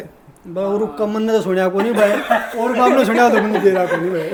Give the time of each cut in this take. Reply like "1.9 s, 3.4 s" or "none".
none